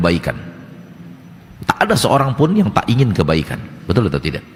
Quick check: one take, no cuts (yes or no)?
yes